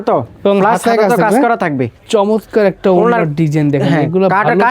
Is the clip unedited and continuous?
no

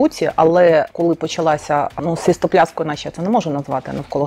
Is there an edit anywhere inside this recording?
yes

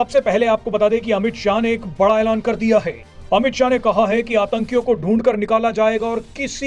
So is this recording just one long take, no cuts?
yes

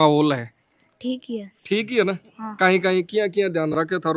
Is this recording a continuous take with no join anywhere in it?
yes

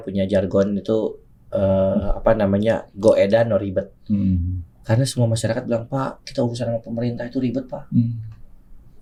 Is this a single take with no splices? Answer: yes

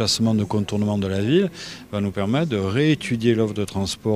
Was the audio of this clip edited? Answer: yes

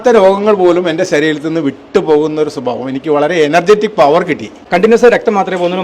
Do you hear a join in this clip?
yes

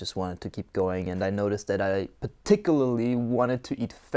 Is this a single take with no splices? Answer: yes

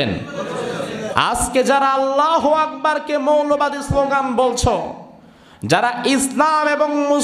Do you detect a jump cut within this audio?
yes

